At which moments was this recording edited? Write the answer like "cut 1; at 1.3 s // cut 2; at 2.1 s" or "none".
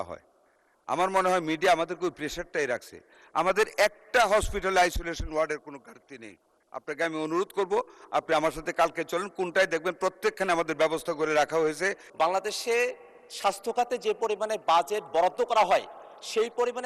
cut 1; at 12.0 s